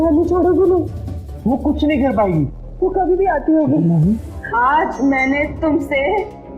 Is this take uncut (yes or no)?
no